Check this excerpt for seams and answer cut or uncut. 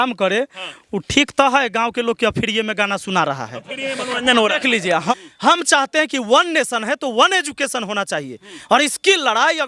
cut